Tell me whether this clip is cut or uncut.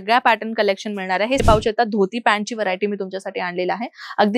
cut